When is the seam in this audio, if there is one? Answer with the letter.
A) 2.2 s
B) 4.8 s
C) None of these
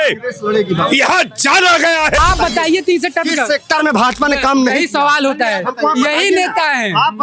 A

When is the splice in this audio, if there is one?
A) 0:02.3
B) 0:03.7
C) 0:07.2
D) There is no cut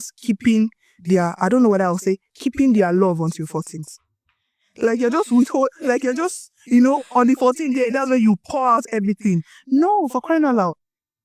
D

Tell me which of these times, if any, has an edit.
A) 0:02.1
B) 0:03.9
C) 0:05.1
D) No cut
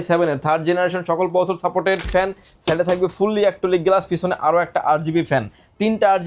A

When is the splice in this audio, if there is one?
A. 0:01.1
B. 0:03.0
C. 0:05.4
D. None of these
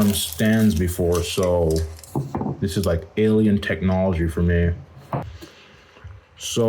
C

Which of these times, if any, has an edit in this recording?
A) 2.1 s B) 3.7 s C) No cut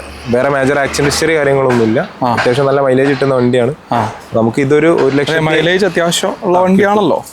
C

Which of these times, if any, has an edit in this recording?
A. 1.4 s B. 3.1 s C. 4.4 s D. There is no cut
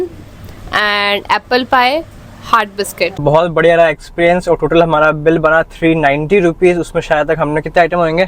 B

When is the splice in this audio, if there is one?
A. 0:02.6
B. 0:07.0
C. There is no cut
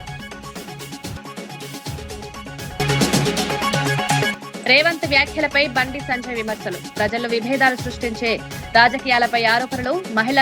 C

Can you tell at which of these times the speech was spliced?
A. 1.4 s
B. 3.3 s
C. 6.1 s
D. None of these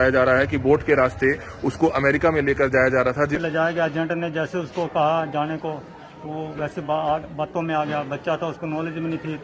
B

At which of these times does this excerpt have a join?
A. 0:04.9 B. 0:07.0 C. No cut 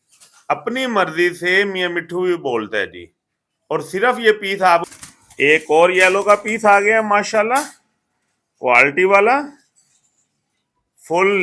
A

